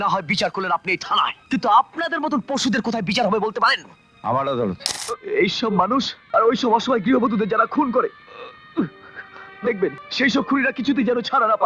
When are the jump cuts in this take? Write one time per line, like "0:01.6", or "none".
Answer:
0:01.4
0:04.9
0:06.2
0:10.0